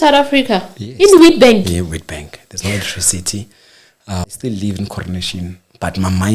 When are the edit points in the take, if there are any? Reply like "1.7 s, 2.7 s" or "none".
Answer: 4.4 s